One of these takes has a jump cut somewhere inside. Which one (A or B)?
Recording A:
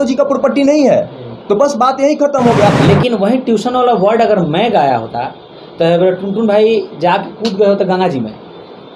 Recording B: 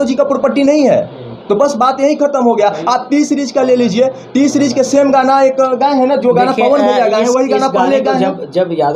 A